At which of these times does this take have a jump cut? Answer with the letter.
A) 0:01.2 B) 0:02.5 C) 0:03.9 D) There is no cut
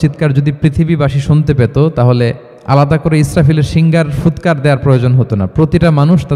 B